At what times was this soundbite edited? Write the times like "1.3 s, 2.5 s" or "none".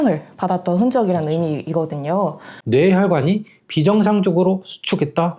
2.5 s